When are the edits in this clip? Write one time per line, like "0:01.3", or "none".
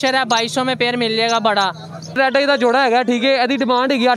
0:02.1